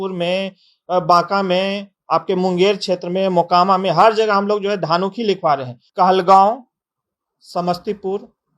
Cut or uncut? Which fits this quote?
cut